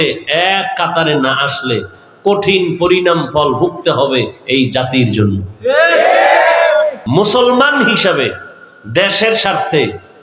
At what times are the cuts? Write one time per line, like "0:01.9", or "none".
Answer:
0:07.0